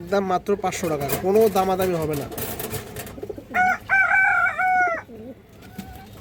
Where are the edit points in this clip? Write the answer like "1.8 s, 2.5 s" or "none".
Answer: none